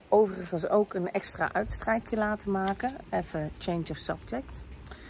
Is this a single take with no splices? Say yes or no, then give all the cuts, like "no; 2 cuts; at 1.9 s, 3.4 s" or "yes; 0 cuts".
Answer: yes; 0 cuts